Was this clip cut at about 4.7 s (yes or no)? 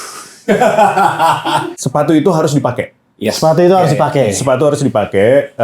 no